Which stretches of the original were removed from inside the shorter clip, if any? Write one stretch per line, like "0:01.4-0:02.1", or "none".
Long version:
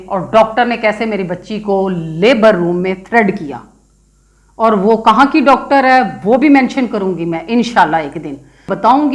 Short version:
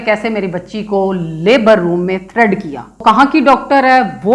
0:03.8-0:05.0